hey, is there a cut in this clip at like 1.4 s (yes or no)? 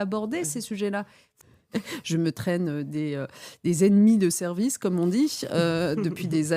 yes